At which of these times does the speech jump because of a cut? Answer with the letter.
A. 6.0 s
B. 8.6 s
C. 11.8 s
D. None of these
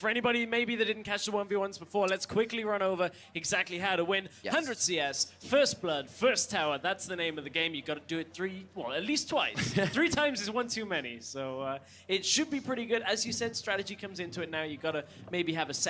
C